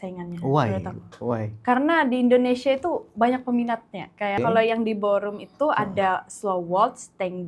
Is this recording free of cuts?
no; 1 cut; at 4.4 s

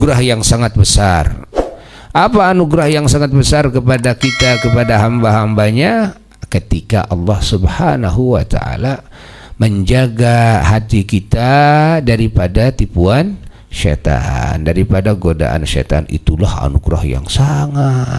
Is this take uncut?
yes; 0 cuts

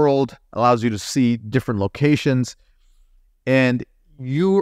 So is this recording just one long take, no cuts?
yes; 0 cuts

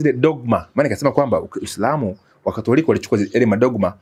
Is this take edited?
no; 0 cuts

